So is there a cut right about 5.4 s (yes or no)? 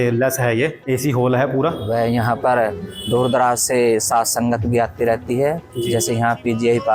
no